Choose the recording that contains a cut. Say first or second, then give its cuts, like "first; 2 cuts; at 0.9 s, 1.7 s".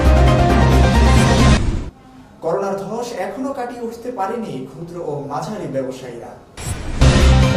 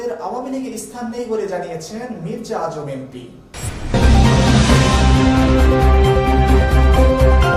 first; 1 cut; at 1.2 s